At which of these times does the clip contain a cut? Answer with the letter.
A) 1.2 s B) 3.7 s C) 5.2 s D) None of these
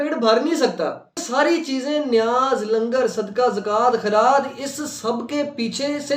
A